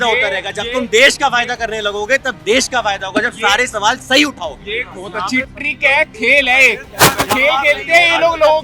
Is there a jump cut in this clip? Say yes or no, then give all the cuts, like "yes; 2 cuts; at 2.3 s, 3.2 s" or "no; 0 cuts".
no; 0 cuts